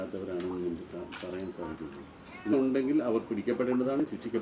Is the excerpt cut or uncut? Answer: cut